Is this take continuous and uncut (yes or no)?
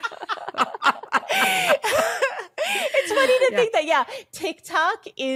yes